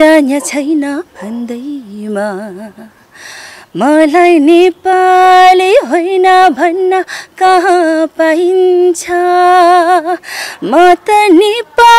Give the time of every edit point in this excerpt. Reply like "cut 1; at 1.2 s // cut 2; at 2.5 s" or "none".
none